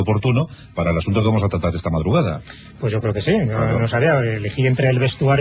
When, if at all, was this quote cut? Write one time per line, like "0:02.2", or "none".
none